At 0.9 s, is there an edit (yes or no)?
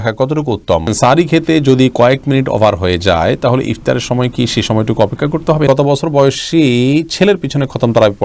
yes